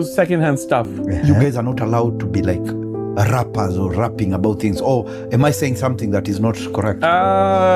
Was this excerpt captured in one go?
no; 1 cut; at 1.2 s

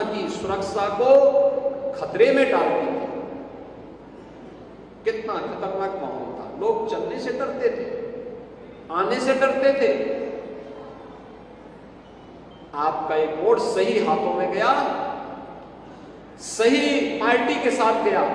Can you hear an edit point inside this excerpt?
no; 0 cuts

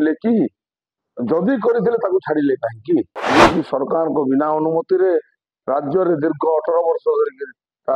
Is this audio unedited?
no; 1 cut; at 3.2 s

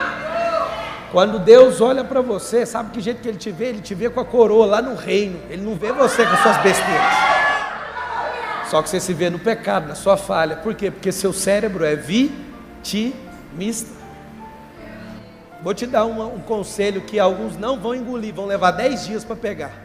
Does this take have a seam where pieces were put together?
no; 0 cuts

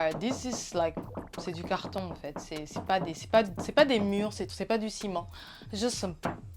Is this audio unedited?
yes; 0 cuts

